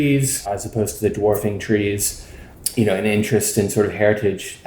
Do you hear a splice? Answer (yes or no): no